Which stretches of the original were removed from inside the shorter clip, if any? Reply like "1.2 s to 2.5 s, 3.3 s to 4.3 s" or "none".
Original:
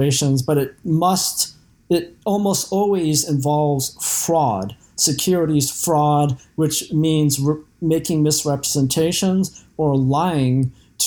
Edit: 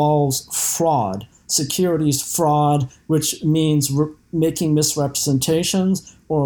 none